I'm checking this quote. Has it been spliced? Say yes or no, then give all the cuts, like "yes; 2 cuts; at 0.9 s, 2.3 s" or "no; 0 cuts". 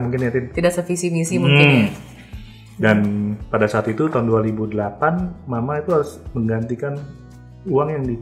no; 0 cuts